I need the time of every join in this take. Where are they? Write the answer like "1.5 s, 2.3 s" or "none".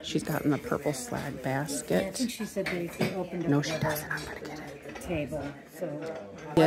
none